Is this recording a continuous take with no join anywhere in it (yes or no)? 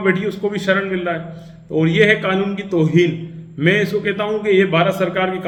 yes